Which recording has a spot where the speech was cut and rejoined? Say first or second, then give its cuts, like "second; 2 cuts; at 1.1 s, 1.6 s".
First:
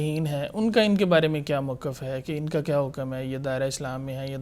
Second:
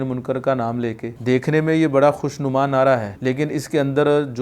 second; 2 cuts; at 1.1 s, 3.1 s